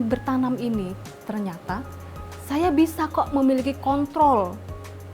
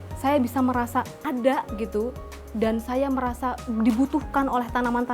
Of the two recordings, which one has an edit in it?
second; 1 cut; at 1.2 s

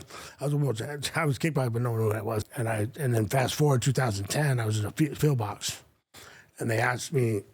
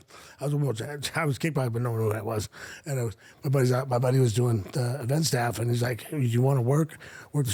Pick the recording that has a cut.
first; 1 cut; at 2.5 s

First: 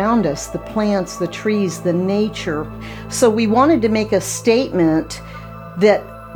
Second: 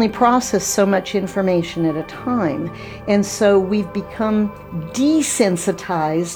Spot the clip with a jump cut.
first; 1 cut; at 2.9 s

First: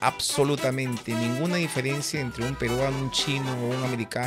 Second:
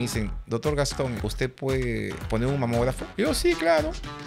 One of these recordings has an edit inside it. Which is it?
second; 3 cuts; at 1.2 s, 2.2 s, 3.0 s

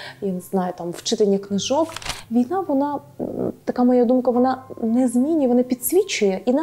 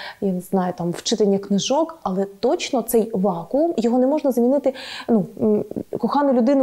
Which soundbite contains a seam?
first; 1 cut; at 2.0 s

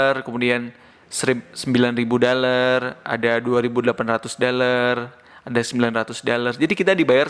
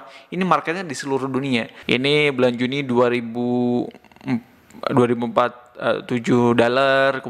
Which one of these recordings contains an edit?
second; 1 cut; at 1.7 s

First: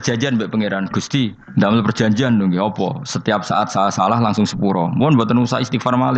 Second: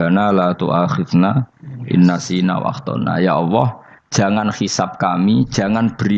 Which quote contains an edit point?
first; 1 cut; at 1.4 s

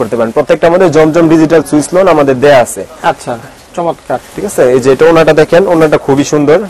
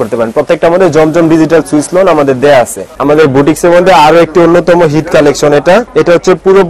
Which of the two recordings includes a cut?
second; 2 cuts; at 2.9 s, 5.9 s

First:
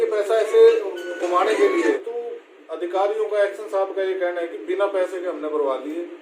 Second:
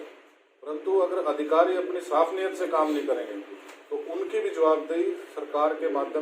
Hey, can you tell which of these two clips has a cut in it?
first; 1 cut; at 2.0 s

